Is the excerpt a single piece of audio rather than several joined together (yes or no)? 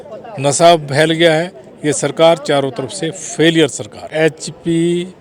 no